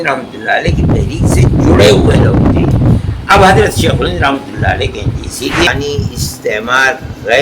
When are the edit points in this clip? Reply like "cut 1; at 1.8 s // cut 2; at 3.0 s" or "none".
cut 1; at 5.7 s